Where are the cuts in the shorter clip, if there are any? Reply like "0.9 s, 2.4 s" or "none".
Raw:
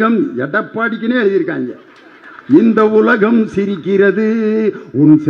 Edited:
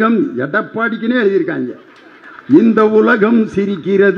none